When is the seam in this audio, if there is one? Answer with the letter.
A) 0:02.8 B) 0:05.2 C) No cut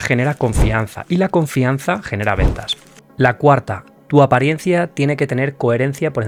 C